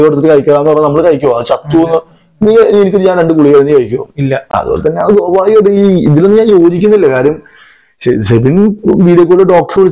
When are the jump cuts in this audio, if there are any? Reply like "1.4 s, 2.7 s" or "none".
none